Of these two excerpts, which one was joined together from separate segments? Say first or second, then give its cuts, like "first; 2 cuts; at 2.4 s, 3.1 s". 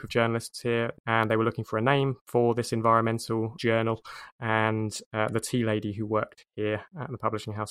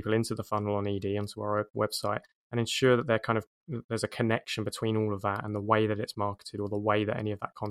first; 4 cuts; at 1.0 s, 2.2 s, 3.5 s, 6.4 s